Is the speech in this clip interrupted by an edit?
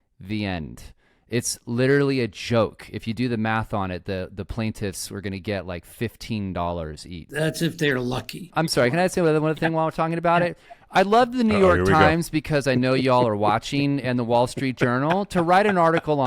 yes; 2 cuts; at 7.3 s, 8.5 s

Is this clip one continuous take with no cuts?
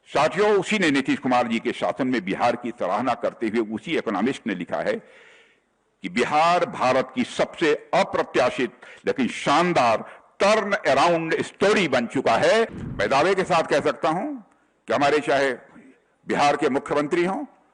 no; 1 cut; at 12.8 s

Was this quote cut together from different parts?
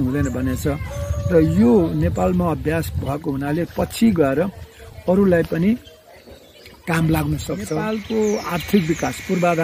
yes; 1 cut; at 7.8 s

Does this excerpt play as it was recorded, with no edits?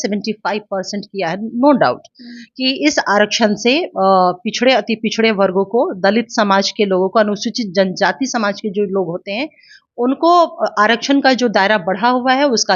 yes; 0 cuts

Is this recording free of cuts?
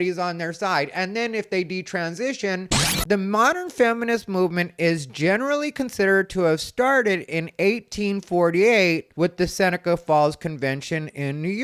no; 1 cut; at 2.9 s

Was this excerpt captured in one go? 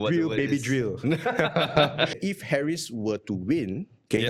no; 1 cut; at 2.2 s

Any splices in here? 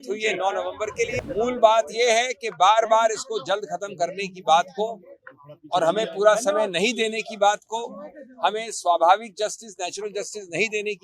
yes; 1 cut; at 1.2 s

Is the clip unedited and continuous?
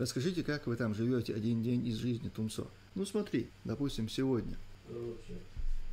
no; 3 cuts; at 2.8 s, 3.6 s, 4.7 s

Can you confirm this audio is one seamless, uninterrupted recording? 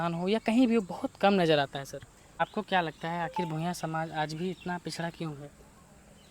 no; 1 cut; at 2.2 s

